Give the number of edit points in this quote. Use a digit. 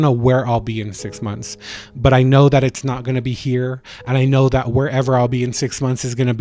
0